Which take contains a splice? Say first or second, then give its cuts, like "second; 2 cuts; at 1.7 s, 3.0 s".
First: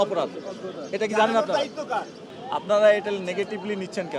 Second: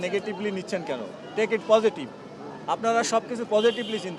first; 1 cut; at 2.2 s